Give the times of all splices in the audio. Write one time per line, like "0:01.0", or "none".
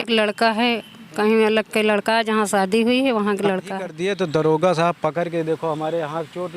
0:03.9